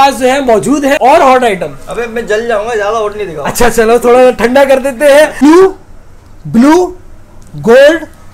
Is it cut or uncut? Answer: cut